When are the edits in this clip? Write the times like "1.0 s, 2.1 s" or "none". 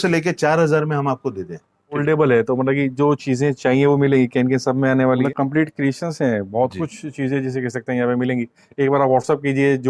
2.0 s, 5.2 s